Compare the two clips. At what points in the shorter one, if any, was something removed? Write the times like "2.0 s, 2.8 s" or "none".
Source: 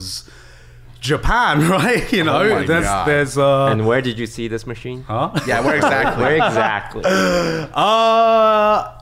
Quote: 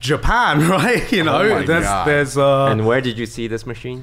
none